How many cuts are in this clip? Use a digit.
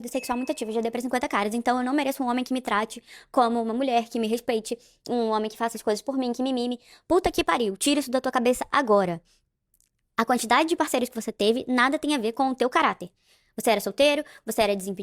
2